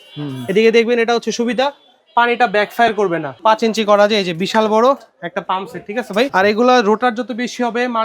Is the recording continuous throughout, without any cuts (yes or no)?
no